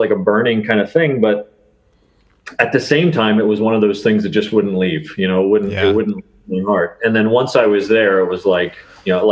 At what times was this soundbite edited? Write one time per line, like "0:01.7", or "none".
none